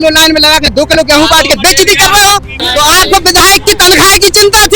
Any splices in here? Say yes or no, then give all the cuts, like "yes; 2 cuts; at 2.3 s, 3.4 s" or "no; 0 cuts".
yes; 1 cut; at 2.6 s